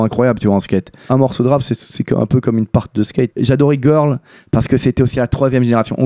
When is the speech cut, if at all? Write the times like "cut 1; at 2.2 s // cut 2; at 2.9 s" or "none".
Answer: cut 1; at 1.1 s // cut 2; at 3.3 s // cut 3; at 5.1 s